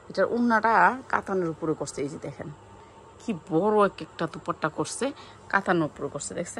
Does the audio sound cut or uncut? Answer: uncut